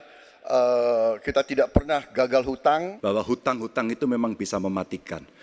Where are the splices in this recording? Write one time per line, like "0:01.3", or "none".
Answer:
0:02.9